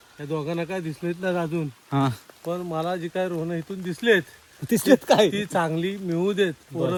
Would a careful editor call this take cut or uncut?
uncut